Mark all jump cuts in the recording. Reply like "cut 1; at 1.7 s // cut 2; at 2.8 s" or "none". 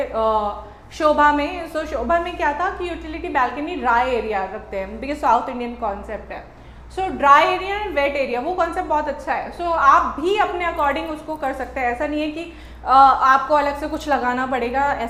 none

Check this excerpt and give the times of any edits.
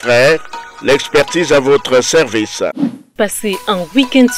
cut 1; at 3.2 s

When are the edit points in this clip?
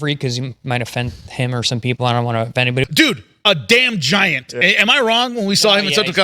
cut 1; at 2.9 s

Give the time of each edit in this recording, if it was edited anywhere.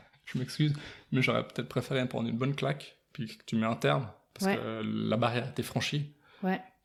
none

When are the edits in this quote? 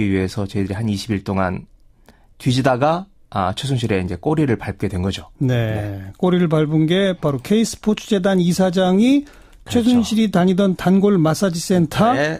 cut 1; at 3.3 s

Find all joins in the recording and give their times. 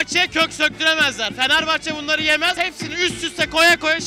cut 1; at 2.6 s

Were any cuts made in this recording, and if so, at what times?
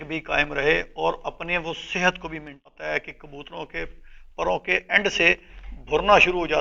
cut 1; at 2.7 s

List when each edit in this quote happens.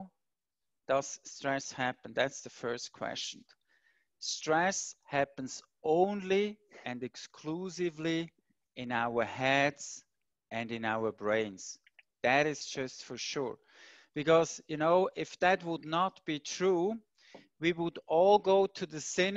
cut 1; at 3.5 s

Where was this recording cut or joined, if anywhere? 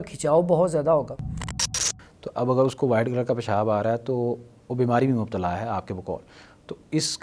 cut 1; at 1.7 s

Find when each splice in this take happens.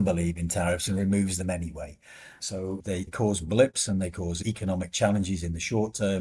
cut 1; at 2.8 s // cut 2; at 4.4 s

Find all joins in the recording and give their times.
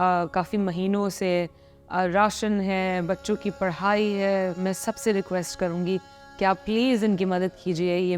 cut 1; at 4.6 s

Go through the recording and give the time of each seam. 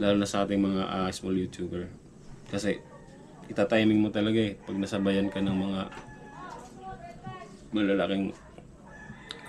none

